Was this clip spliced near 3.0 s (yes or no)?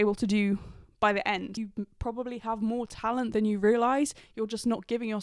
no